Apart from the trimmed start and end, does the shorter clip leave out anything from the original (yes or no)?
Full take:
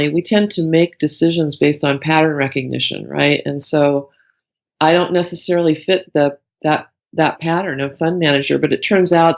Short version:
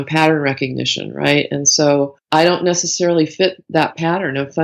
yes